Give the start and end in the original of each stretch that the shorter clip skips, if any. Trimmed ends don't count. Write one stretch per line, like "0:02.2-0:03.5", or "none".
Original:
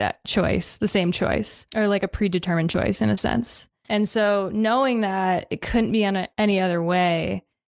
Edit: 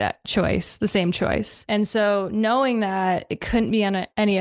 0:01.6-0:03.8